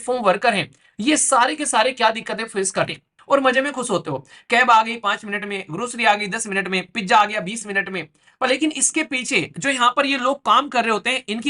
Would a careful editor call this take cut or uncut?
cut